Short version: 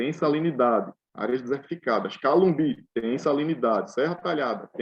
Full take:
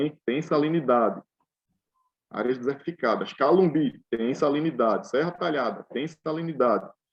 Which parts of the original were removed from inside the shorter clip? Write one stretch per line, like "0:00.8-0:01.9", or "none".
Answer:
0:01.3-0:02.2

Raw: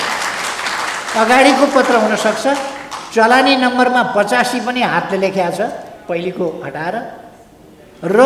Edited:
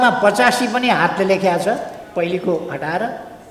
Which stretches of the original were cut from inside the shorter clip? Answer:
none

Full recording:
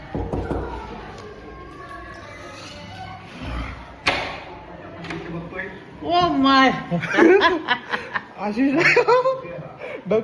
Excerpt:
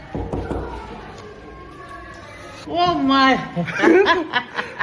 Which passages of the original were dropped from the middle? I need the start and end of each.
0:02.6-0:05.9

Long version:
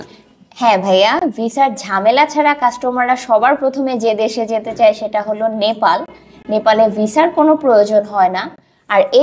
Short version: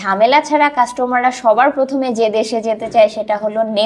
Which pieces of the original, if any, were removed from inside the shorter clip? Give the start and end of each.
none

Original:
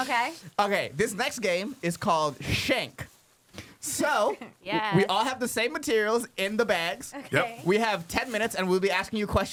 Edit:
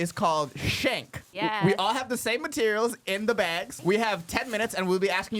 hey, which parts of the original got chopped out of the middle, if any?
0:03.1-0:04.5
0:07.0-0:07.5

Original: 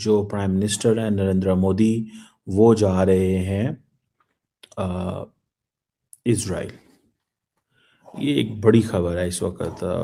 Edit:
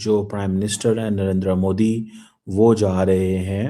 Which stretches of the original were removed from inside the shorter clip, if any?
none

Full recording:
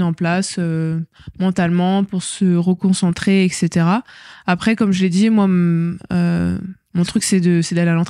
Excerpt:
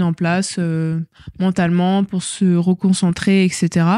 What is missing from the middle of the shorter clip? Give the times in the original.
none

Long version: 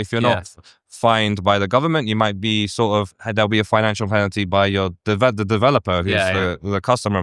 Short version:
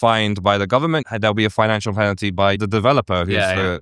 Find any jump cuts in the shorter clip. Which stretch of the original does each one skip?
0:02.1-0:03.2
0:04.7-0:05.3

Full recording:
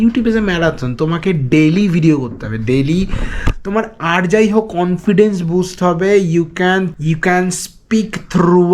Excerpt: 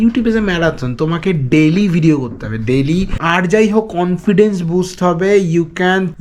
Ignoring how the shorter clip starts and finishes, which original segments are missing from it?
0:03.2-0:04.0

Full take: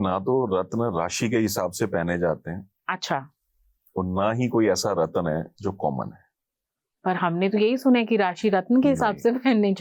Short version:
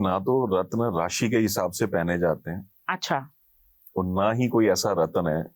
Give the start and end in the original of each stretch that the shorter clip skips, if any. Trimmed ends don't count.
none

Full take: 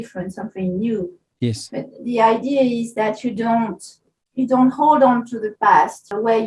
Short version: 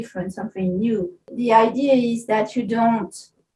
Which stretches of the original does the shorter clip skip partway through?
0:01.2-0:01.9

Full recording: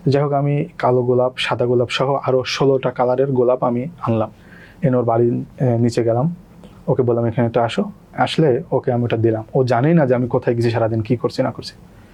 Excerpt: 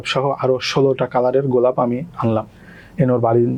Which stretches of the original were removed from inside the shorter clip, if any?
none

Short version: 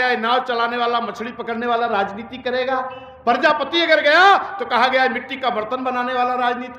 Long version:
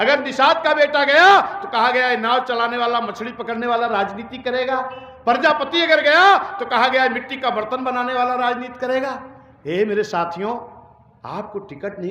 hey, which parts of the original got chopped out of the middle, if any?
none

